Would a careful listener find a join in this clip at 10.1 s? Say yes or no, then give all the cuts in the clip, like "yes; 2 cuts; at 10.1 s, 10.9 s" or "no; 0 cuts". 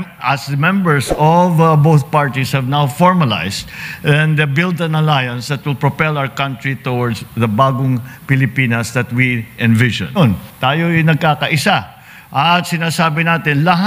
yes; 1 cut; at 10.1 s